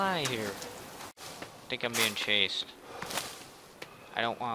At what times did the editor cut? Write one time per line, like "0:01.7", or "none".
0:01.2